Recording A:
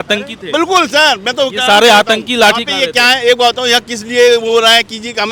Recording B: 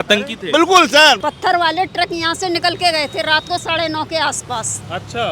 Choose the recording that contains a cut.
B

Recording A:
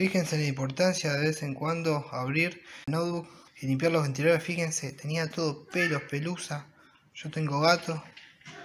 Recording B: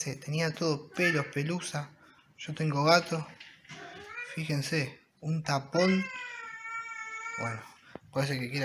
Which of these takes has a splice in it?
A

